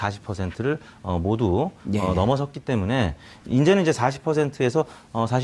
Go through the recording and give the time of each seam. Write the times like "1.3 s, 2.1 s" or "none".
0.9 s